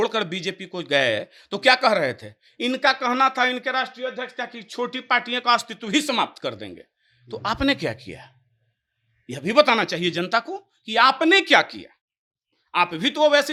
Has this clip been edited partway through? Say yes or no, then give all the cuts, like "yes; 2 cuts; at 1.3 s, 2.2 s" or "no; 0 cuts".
no; 0 cuts